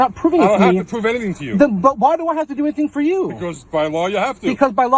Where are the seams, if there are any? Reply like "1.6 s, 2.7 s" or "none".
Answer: none